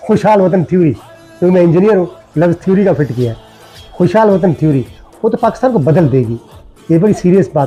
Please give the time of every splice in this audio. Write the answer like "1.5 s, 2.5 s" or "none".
none